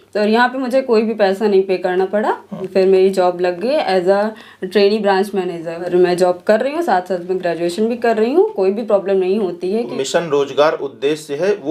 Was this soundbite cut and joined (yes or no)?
yes